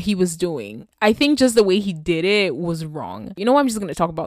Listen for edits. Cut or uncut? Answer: cut